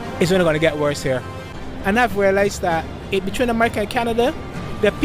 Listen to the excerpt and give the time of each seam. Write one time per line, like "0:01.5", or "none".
0:01.5